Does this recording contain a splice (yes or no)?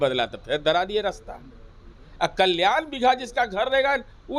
no